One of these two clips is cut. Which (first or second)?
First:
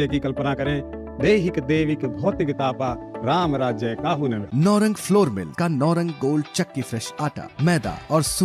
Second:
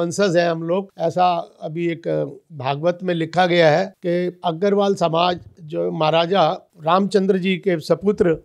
second